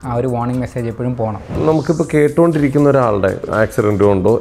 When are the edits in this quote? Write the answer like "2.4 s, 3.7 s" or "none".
1.5 s, 3.4 s